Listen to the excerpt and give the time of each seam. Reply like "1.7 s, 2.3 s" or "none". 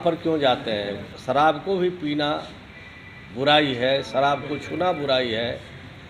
1.1 s